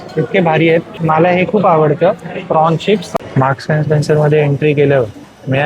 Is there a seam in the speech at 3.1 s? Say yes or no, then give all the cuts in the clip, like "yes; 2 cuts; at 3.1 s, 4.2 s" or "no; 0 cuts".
yes; 2 cuts; at 0.9 s, 3.1 s